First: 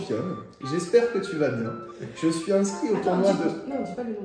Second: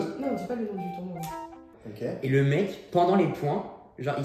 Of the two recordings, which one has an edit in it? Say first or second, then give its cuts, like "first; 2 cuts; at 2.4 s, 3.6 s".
second; 1 cut; at 1.7 s